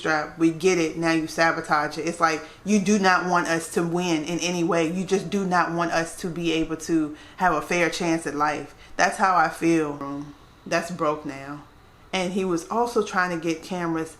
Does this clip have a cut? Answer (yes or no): yes